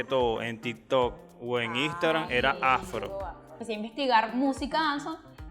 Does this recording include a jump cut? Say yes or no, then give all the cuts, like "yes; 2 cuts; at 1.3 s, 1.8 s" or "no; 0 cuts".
yes; 1 cut; at 3.5 s